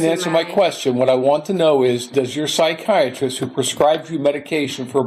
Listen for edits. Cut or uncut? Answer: uncut